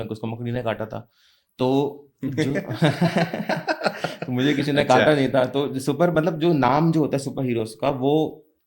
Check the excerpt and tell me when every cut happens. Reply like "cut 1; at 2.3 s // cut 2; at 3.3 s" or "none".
none